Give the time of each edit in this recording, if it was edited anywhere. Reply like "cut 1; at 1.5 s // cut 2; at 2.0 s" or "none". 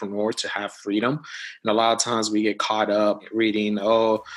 cut 1; at 3.2 s